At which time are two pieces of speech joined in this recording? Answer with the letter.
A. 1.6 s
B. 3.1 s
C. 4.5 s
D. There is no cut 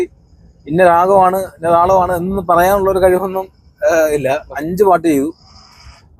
C